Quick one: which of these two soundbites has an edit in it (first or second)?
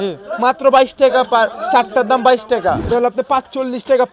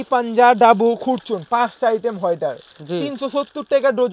first